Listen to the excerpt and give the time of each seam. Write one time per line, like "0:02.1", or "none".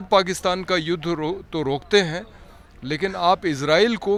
none